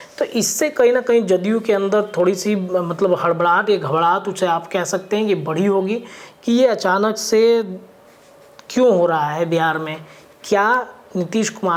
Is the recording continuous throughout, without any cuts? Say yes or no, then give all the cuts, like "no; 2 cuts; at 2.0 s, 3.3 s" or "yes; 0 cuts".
yes; 0 cuts